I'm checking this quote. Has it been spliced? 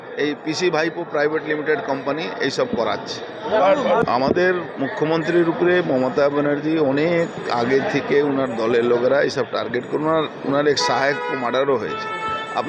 yes; 1 cut; at 4.0 s

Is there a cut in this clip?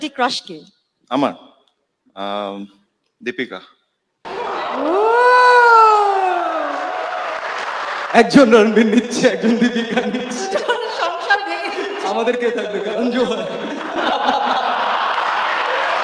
no; 0 cuts

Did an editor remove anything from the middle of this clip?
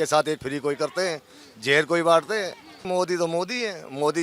yes; 1 cut; at 2.8 s

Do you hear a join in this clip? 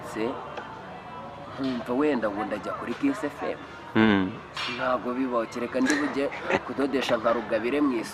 no; 0 cuts

